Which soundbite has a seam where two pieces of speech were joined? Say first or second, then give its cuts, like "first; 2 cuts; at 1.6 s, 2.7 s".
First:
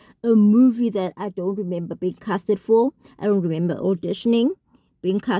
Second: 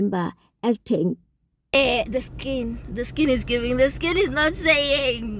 second; 1 cut; at 1.7 s